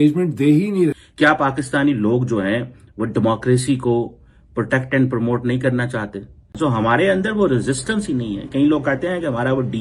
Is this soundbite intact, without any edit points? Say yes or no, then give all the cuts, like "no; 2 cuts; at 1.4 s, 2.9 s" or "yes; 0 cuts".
no; 2 cuts; at 1.0 s, 6.5 s